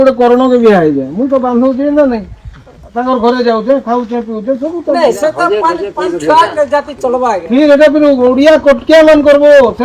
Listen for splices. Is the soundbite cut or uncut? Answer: uncut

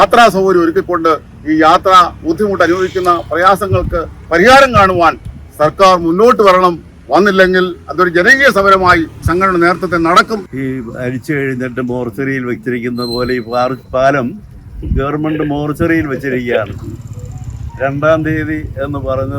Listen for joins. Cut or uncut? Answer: cut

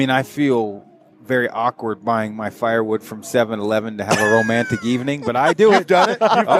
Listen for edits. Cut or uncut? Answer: uncut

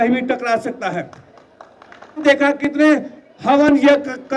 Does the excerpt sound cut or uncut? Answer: cut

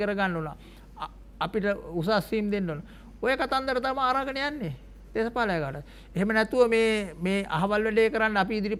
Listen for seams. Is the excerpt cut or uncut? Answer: uncut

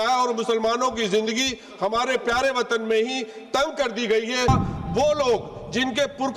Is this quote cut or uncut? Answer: cut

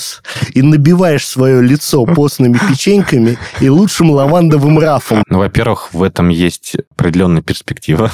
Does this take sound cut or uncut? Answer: cut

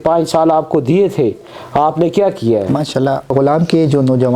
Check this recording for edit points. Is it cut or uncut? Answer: cut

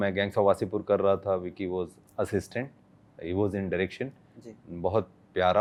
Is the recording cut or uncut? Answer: uncut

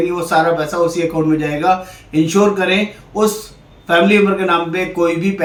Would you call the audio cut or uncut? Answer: uncut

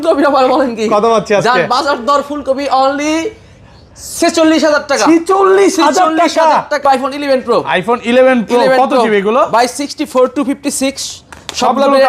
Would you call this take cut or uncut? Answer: cut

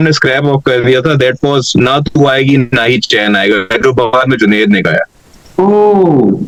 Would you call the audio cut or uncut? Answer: uncut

